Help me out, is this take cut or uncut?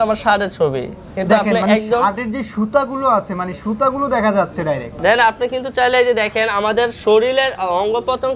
cut